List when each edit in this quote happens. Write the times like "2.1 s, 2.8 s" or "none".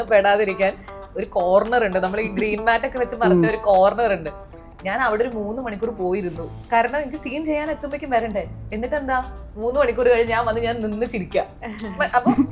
none